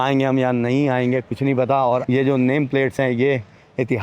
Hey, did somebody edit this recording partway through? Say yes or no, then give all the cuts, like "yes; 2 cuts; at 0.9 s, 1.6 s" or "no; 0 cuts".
no; 0 cuts